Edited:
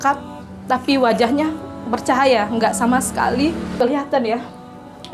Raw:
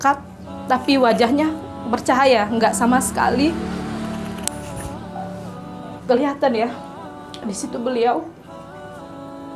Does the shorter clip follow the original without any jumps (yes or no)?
no